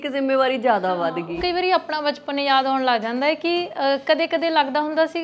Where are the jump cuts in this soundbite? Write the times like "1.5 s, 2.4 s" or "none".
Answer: 1.3 s